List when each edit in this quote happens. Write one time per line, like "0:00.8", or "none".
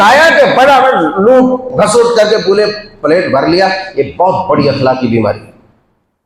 none